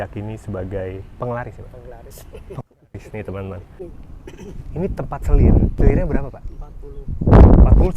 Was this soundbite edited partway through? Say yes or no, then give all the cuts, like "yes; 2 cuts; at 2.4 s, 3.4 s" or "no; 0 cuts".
yes; 2 cuts; at 3.8 s, 5.8 s